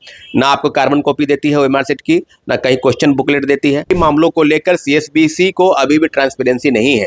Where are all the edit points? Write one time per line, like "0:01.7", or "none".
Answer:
0:03.9